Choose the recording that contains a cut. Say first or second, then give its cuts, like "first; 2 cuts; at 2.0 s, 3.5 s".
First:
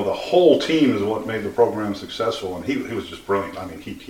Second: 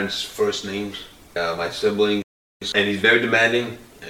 second; 2 cuts; at 1.3 s, 2.6 s